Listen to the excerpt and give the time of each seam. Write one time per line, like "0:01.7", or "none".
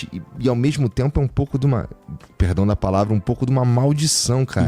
none